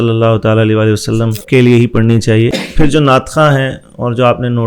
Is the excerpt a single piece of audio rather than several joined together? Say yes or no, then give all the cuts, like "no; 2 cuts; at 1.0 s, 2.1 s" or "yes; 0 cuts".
no; 2 cuts; at 1.4 s, 2.6 s